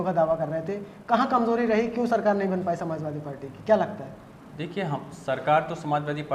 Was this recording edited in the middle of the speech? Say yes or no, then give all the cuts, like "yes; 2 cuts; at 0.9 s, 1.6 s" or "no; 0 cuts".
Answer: no; 0 cuts